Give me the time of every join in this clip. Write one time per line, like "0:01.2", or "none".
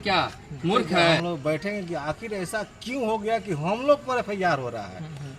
0:01.2